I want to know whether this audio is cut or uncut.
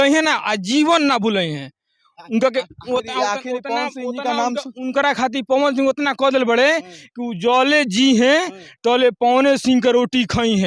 uncut